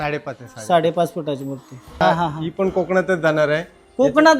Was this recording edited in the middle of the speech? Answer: yes; 1 cut; at 2.0 s

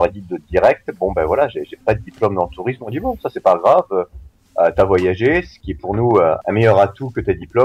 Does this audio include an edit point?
yes; 3 cuts; at 1.8 s, 5.6 s, 6.4 s

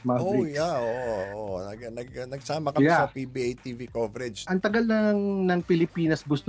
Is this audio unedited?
no; 1 cut; at 4.4 s

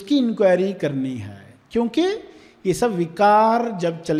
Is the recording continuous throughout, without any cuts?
yes; 0 cuts

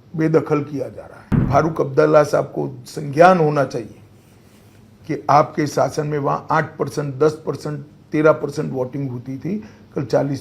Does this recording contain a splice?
yes; 1 cut; at 1.4 s

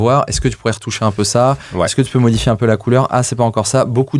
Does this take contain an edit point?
no; 0 cuts

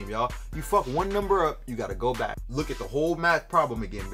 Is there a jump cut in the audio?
no; 0 cuts

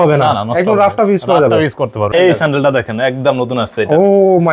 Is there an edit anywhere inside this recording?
yes; 1 cut; at 2.1 s

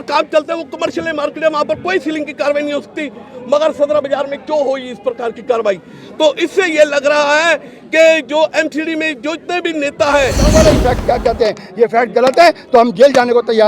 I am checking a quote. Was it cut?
yes; 1 cut; at 10.5 s

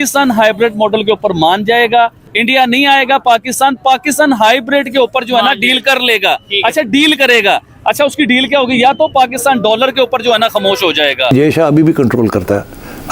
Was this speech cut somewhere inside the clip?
yes; 2 cuts; at 2.2 s, 11.3 s

